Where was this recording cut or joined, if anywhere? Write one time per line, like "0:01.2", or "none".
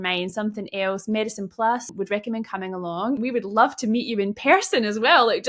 0:01.9
0:03.2